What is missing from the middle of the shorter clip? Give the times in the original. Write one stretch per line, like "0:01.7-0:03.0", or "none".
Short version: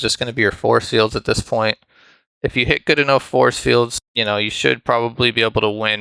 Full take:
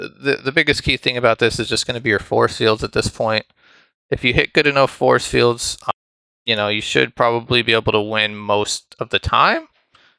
0:05.7-0:06.3